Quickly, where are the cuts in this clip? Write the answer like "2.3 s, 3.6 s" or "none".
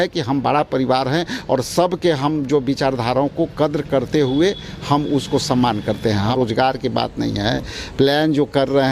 6.3 s

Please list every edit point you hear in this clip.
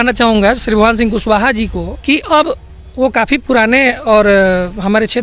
1.9 s

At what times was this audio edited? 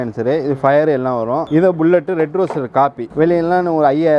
1.5 s, 3.0 s

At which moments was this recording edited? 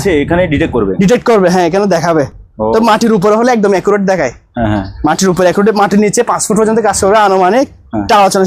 none

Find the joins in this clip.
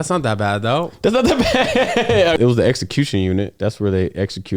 2.4 s

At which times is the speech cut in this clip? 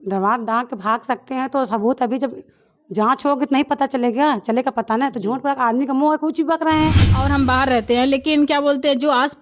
7.1 s

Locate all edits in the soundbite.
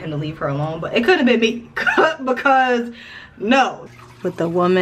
3.8 s

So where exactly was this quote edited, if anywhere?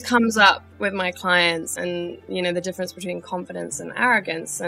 1.7 s

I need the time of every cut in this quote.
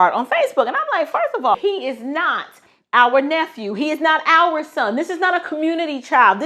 1.6 s

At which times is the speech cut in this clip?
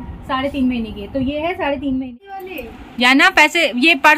2.2 s

